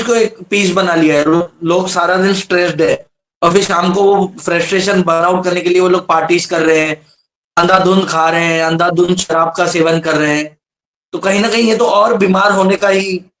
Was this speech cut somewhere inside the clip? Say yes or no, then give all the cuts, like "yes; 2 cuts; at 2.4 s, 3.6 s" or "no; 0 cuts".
no; 0 cuts